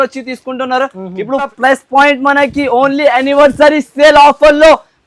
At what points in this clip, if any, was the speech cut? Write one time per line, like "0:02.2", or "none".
0:01.5

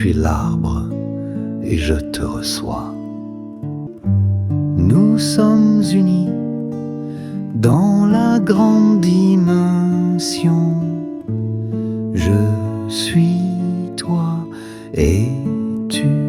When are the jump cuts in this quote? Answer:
0:03.9

